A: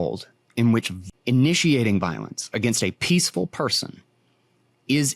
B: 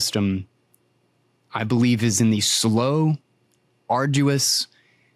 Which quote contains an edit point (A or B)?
A